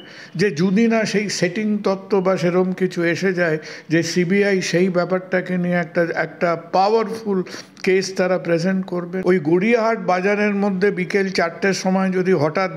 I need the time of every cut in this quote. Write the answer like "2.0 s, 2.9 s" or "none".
9.2 s